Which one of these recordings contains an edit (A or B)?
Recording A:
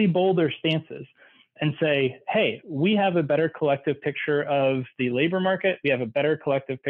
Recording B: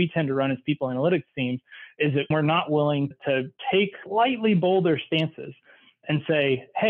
B